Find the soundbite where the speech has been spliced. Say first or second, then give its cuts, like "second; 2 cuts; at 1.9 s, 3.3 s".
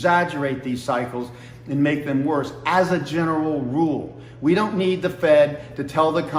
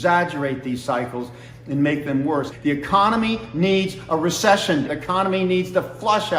second; 2 cuts; at 2.5 s, 4.9 s